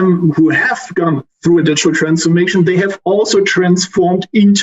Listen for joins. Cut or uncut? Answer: uncut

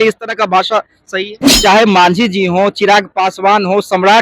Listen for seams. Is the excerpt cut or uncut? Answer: cut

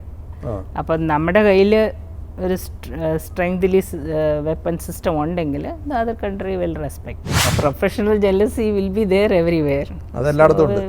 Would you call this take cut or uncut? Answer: cut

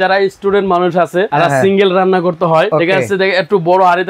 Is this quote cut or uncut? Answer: cut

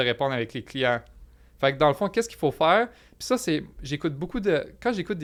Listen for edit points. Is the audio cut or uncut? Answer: uncut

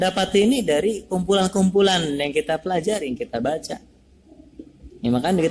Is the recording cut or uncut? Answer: uncut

